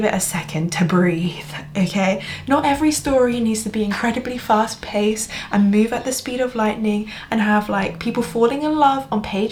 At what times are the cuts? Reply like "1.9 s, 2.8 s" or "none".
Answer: none